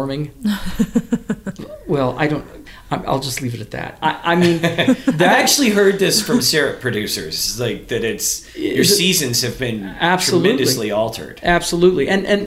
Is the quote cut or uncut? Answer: uncut